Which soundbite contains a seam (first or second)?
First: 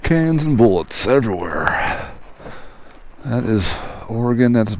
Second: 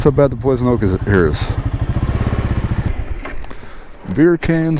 second